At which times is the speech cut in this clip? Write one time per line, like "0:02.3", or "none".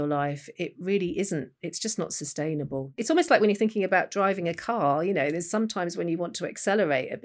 0:03.0